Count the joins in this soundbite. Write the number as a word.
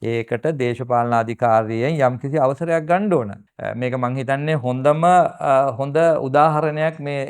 one